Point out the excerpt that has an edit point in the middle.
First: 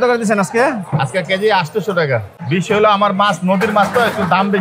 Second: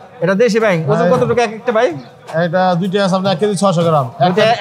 first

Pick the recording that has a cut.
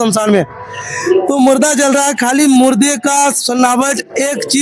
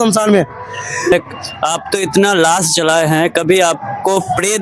second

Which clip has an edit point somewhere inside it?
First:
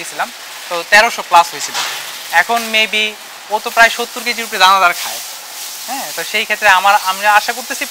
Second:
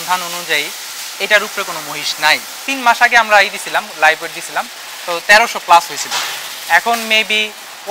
second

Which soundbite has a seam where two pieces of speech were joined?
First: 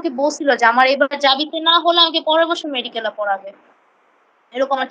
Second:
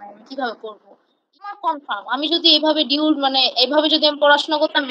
second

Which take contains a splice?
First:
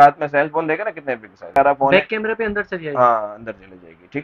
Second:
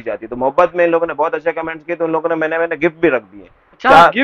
first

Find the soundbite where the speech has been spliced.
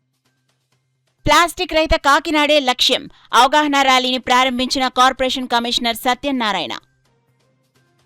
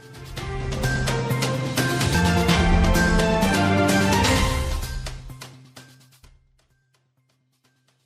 second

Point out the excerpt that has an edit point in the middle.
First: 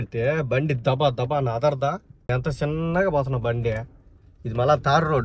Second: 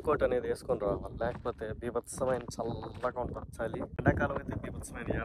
second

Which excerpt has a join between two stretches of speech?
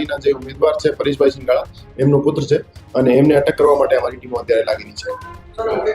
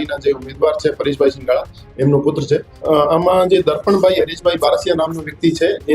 second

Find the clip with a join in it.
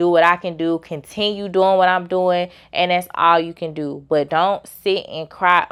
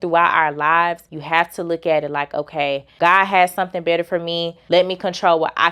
second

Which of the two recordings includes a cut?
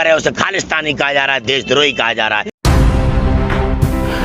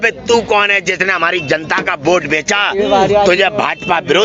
first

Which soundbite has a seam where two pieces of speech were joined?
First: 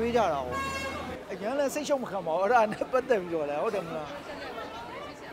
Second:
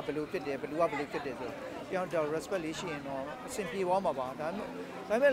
first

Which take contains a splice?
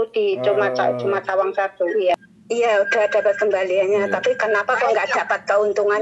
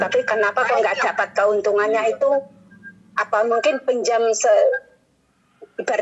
first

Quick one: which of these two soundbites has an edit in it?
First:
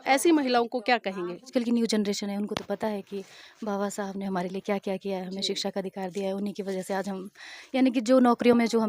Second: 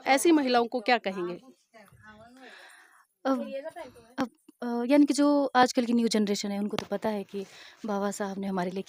first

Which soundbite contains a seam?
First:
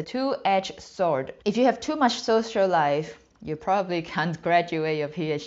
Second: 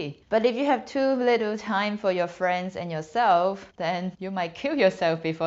first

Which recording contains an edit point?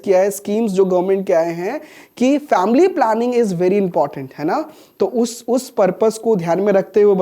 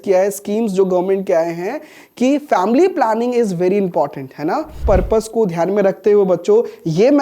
second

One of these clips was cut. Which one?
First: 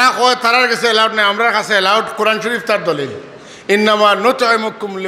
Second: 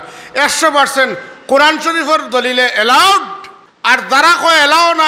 second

